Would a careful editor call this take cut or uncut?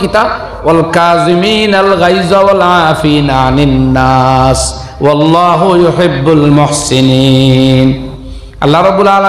uncut